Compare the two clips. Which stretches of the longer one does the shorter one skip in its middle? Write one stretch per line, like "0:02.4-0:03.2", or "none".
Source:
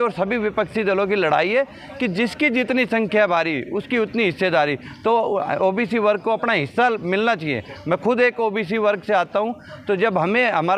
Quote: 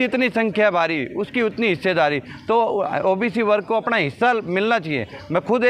none